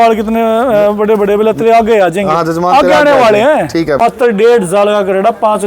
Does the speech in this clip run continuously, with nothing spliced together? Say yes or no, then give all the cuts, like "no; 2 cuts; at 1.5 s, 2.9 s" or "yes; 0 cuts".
no; 1 cut; at 4.0 s